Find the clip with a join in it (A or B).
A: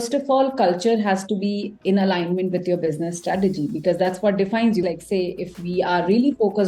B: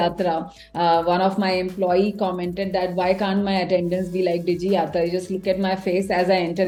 A